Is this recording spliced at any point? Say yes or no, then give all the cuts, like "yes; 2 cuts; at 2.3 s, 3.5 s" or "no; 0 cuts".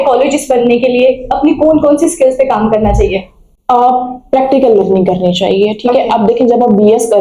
no; 0 cuts